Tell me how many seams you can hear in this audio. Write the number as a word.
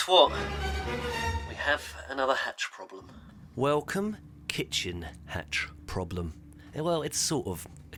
zero